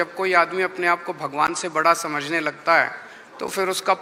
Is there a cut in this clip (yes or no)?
no